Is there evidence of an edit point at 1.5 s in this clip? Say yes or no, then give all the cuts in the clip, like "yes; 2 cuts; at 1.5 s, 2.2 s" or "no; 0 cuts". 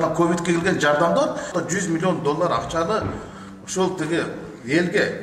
yes; 1 cut; at 1.5 s